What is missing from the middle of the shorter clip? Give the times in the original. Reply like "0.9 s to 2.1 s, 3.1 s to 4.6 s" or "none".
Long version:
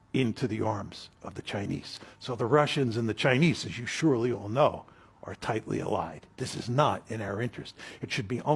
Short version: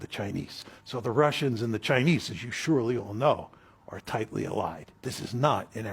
none

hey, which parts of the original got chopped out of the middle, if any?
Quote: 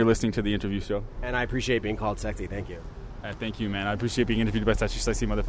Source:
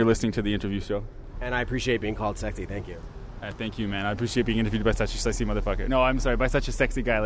1.2 s to 1.3 s

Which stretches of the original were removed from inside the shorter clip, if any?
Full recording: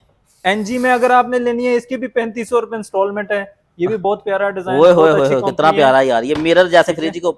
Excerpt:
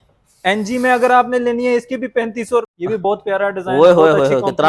2.7 s to 3.7 s

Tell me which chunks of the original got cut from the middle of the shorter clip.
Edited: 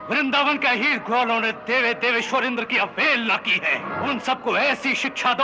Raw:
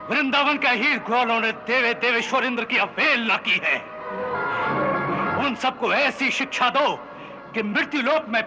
3.9 s to 5.3 s

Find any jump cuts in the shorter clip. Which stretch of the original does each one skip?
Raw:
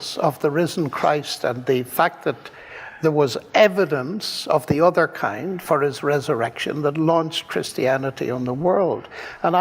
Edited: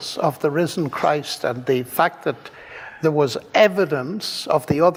none

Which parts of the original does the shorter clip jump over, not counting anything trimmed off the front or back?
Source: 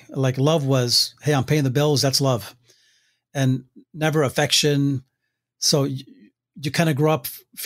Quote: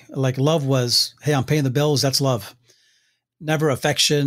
3.2 s to 3.7 s

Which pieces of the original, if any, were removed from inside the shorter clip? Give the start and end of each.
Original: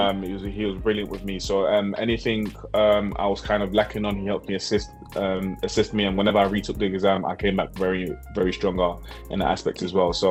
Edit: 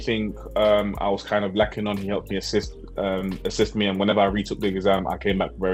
none

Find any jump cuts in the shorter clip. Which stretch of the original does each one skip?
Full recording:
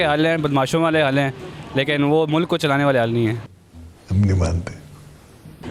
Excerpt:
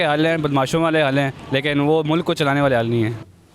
1.4 s to 1.6 s

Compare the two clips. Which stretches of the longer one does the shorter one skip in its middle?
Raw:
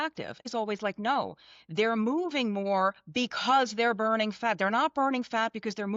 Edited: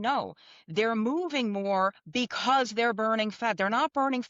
none

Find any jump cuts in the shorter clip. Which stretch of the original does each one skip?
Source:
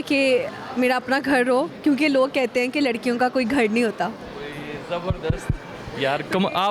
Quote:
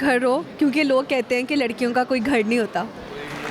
none

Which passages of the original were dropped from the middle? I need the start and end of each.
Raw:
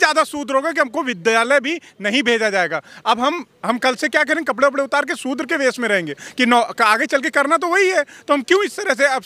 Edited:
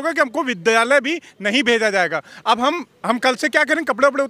none

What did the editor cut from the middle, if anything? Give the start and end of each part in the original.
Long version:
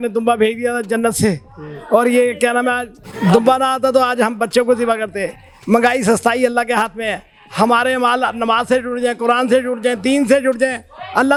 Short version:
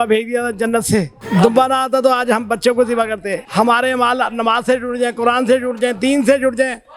1.5 s to 3.1 s, 5.3 s to 7.4 s

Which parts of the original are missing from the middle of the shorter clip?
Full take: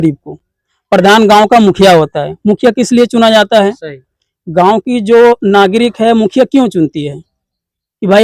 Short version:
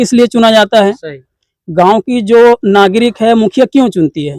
none

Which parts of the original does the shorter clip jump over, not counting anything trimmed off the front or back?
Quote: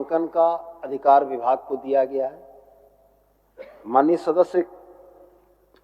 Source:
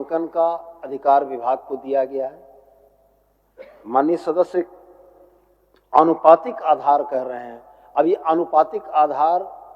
none

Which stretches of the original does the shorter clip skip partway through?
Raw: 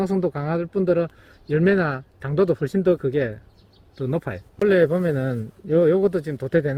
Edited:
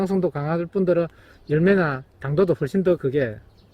none

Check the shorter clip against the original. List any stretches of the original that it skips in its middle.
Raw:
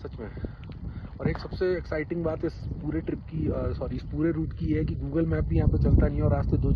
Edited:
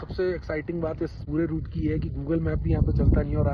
2.6 s to 4.1 s

